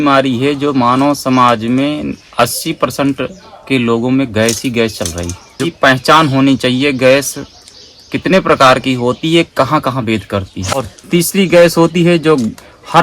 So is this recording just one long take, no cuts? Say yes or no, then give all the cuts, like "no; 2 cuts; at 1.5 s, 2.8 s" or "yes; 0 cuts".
no; 2 cuts; at 5.7 s, 10.8 s